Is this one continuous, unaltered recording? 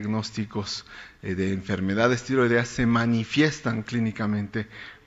yes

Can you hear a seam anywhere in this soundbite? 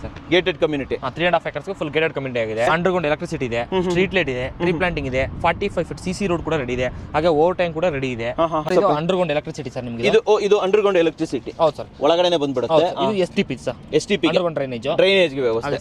yes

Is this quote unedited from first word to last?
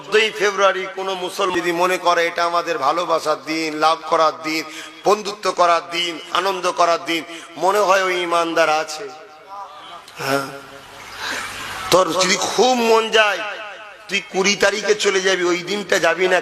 no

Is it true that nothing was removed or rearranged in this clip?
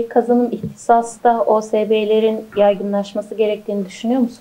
yes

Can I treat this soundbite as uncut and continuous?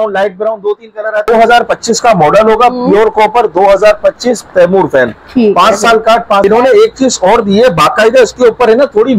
no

